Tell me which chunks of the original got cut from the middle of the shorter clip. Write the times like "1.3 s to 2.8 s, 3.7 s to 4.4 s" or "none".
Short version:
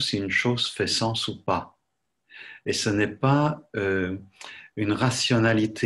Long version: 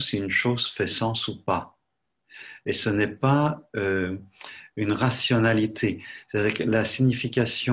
none